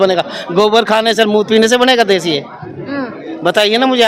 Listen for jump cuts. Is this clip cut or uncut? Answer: uncut